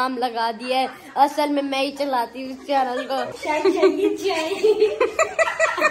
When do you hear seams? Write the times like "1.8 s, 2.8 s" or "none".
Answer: 3.4 s